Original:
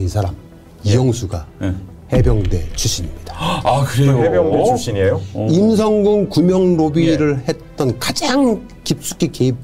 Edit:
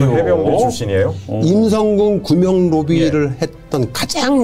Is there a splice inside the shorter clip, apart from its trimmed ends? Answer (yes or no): no